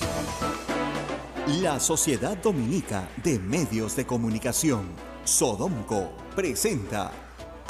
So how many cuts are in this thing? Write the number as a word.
one